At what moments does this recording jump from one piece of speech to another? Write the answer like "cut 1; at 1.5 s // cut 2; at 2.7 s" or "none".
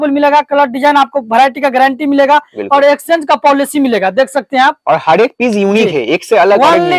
none